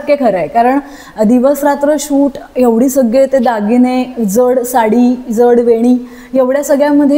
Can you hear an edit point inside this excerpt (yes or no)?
no